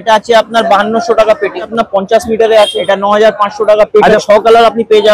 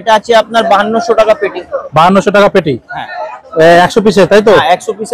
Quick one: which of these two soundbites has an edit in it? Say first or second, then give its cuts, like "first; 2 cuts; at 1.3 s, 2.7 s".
first; 3 cuts; at 1.7 s, 2.8 s, 4.2 s